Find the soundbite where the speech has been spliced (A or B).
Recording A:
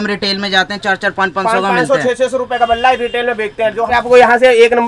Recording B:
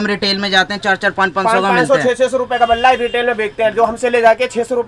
A